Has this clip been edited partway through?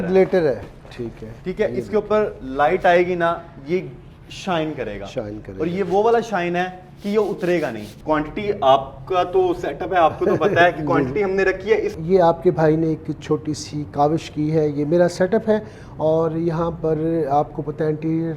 yes; 2 cuts; at 7.9 s, 11.9 s

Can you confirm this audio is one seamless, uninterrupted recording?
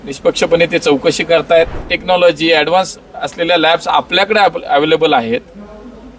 no; 1 cut; at 1.9 s

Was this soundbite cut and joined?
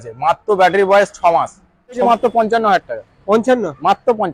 yes; 1 cut; at 2.0 s

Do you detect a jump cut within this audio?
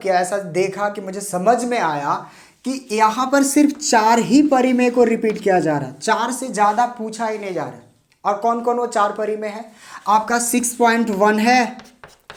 no; 0 cuts

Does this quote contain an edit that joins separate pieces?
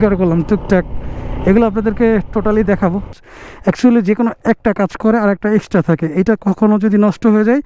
yes; 1 cut; at 3.2 s

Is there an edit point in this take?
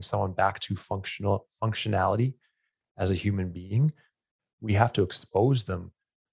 no; 0 cuts

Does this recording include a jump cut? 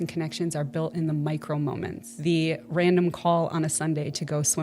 yes; 1 cut; at 2.0 s

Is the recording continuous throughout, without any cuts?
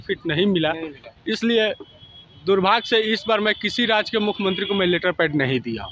yes; 0 cuts

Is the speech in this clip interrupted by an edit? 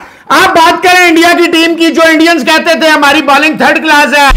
no; 0 cuts

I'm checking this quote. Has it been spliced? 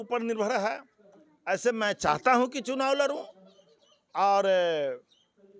no; 0 cuts

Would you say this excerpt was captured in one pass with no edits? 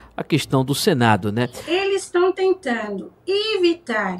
no; 1 cut; at 1.6 s

